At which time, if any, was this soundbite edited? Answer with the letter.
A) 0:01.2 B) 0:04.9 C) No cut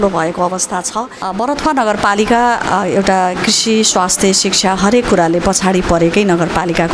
A